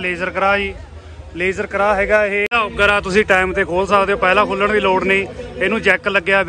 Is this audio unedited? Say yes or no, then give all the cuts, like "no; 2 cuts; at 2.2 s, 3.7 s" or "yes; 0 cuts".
no; 1 cut; at 2.5 s